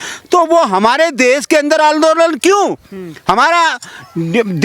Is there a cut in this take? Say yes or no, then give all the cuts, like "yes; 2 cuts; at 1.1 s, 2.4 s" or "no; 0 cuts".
no; 0 cuts